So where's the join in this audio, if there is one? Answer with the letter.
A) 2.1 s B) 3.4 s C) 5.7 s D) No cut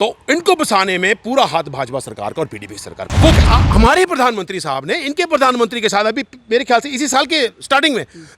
B